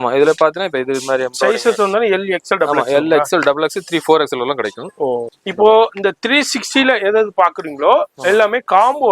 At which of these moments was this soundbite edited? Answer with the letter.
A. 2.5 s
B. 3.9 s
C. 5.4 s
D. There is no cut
C